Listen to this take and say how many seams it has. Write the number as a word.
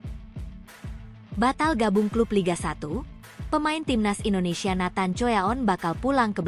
one